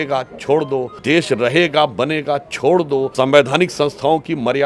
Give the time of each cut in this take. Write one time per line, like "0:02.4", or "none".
0:00.9
0:03.1